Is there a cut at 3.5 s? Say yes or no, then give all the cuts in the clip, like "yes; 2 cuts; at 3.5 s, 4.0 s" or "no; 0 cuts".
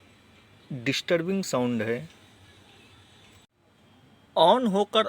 yes; 1 cut; at 3.5 s